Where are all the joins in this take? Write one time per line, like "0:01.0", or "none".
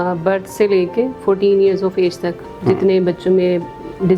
none